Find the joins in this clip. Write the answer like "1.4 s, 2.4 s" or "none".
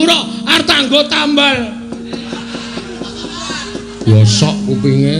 2.8 s